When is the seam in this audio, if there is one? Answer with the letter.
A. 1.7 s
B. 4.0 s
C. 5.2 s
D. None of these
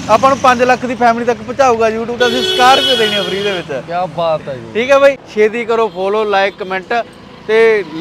C